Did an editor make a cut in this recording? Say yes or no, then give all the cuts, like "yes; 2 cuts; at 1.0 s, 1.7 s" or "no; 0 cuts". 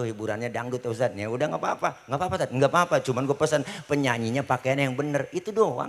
no; 0 cuts